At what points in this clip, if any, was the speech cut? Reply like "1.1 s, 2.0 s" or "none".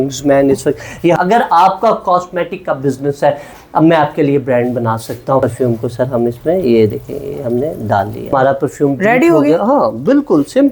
1.2 s, 5.4 s, 8.3 s